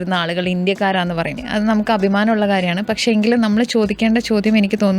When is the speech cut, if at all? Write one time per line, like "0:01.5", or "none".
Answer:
0:01.4